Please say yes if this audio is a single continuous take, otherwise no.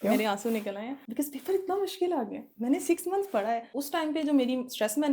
no